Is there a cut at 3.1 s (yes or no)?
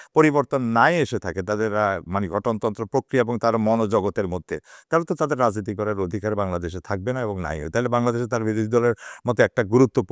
no